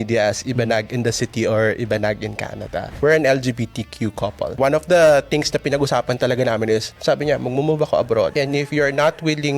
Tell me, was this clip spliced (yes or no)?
yes